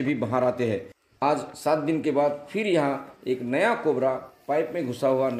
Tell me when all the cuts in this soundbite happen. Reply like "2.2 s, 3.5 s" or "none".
1.0 s